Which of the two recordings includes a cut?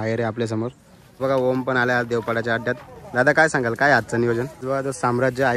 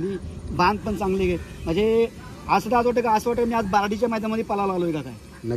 first; 2 cuts; at 1.1 s, 4.6 s

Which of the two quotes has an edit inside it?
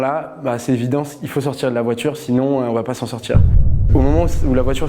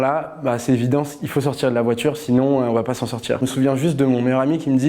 second; 1 cut; at 3.4 s

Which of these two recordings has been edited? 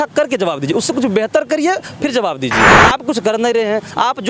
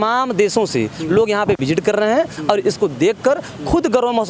first; 1 cut; at 2.7 s

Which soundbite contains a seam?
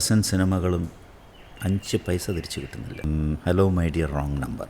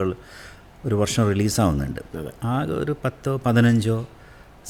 first; 1 cut; at 3.0 s

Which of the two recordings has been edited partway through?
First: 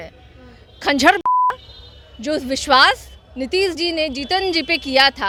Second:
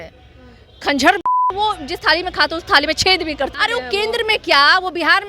second; 2 cuts; at 1.5 s, 3.5 s

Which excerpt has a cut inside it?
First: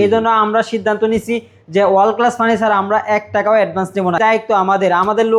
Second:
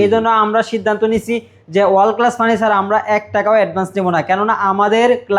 first; 1 cut; at 4.2 s

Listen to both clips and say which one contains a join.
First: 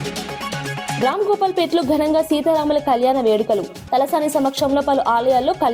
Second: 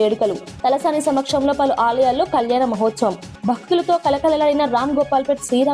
first; 1 cut; at 1.0 s

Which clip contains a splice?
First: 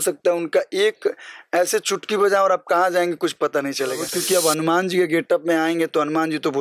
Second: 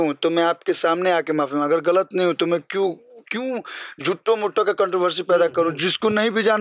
first; 1 cut; at 4.1 s

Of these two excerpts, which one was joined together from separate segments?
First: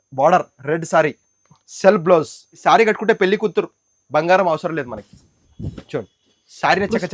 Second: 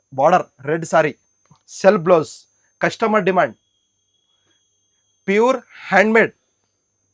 first; 1 cut; at 2.4 s

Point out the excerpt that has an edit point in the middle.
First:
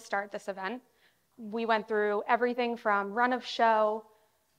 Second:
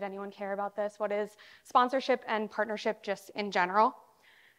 first; 1 cut; at 1.2 s

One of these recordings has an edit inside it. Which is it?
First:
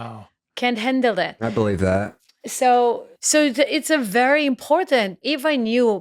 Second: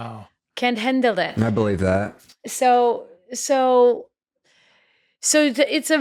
first; 2 cuts; at 3.1 s, 5.2 s

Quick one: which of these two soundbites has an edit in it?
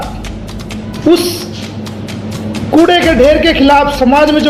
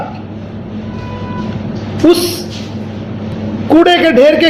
first; 1 cut; at 0.9 s

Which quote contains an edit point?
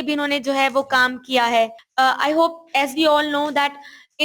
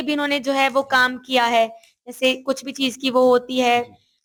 first; 1 cut; at 1.8 s

